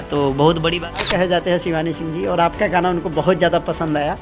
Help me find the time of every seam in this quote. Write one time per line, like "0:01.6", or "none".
0:01.0